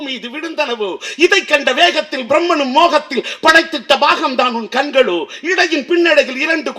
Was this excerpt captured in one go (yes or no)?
yes